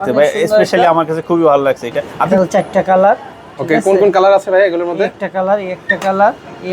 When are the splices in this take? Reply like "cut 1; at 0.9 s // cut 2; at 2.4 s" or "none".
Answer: cut 1; at 2.3 s